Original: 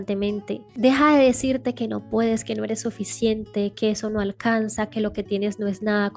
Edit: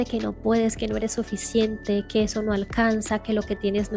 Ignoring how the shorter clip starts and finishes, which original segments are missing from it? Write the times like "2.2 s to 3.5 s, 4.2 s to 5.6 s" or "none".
none